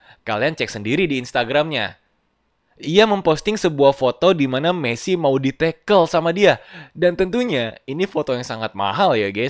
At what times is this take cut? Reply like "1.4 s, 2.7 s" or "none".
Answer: none